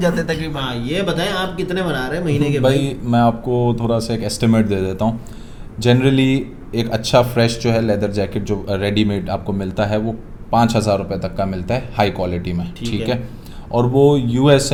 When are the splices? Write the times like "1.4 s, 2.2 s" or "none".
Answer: none

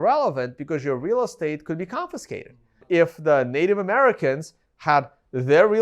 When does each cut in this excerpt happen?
2.8 s

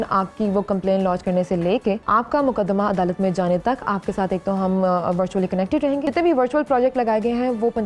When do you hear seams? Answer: 2.0 s, 6.1 s

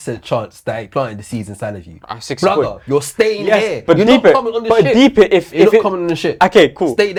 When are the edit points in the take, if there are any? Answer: none

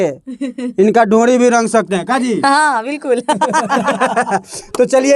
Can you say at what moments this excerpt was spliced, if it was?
none

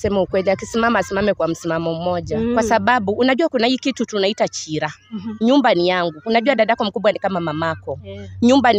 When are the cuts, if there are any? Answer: none

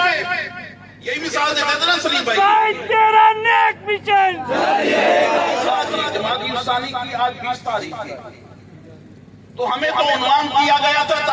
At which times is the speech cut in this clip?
5.9 s

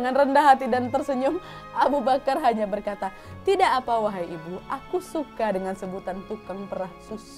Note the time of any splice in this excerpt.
none

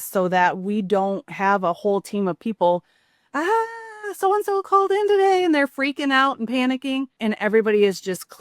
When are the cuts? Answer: 7.1 s

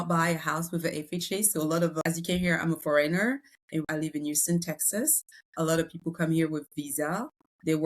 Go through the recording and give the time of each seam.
1.9 s, 3.9 s

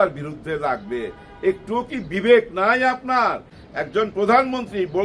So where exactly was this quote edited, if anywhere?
3.5 s

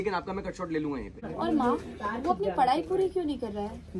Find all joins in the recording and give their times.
1.3 s

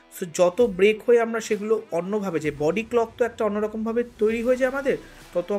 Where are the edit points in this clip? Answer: none

